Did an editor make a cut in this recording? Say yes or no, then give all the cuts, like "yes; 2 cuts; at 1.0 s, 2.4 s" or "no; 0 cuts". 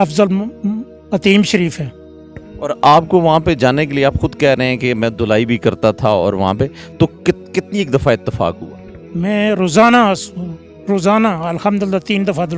no; 0 cuts